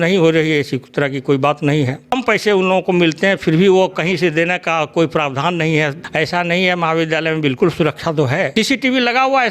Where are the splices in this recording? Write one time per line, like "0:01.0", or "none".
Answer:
0:02.1
0:06.0
0:08.5